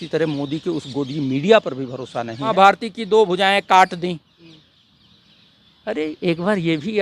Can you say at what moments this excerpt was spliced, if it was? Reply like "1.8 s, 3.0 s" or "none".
2.4 s